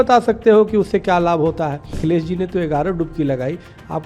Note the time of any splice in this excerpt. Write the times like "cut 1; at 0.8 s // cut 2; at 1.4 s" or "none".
cut 1; at 2.0 s